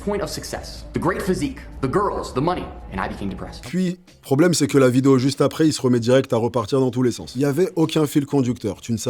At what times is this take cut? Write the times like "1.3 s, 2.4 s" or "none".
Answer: none